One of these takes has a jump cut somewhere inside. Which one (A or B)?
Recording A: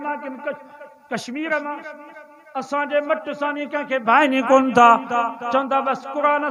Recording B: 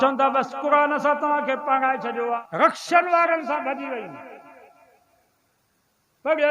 B